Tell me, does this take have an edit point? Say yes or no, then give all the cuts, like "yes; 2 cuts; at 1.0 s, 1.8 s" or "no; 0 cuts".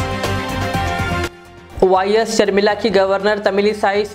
no; 0 cuts